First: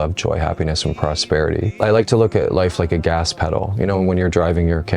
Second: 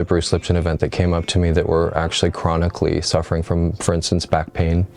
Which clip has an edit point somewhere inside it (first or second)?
first